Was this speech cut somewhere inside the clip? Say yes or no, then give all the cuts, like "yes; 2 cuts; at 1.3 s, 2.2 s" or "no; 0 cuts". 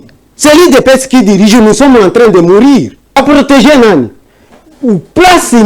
yes; 1 cut; at 3.2 s